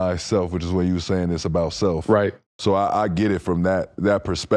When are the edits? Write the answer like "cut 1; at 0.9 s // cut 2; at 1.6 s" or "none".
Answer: cut 1; at 2.5 s